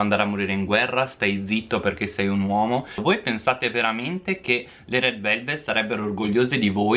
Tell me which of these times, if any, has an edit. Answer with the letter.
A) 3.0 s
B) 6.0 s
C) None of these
A